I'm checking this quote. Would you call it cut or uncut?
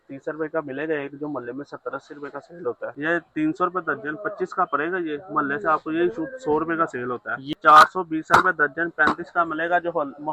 cut